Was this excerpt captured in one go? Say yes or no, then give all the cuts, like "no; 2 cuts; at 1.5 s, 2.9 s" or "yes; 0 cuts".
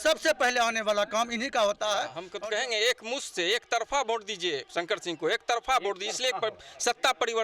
no; 1 cut; at 2.2 s